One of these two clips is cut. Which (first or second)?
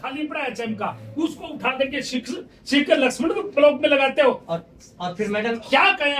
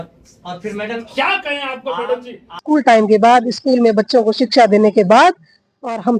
second